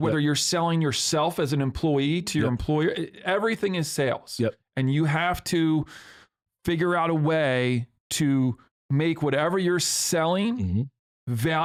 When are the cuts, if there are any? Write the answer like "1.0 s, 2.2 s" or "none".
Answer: none